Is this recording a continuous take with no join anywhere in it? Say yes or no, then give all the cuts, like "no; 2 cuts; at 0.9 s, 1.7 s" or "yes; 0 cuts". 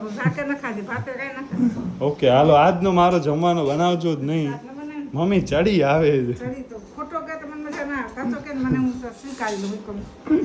yes; 0 cuts